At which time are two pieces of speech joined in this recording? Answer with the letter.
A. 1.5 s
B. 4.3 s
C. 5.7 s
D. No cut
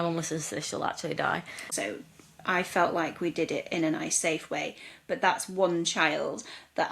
A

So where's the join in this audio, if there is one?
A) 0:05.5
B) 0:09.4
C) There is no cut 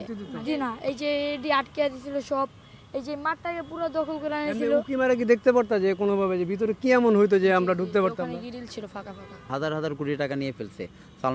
B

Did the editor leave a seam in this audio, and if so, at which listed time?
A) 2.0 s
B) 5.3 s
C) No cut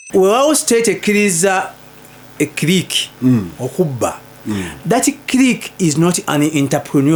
C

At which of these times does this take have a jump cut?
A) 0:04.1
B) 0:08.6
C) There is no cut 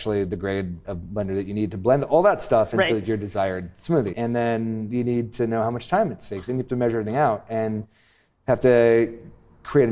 A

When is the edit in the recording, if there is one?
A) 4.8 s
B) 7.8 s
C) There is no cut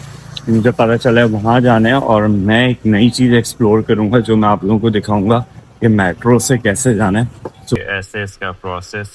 B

